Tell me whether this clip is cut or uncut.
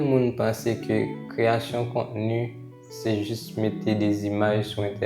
uncut